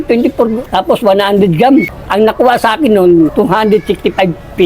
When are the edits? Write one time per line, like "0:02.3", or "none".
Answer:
0:02.0